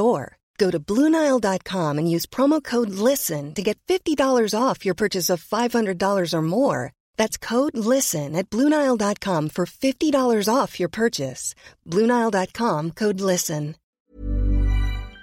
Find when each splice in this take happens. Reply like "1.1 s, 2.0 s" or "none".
14.2 s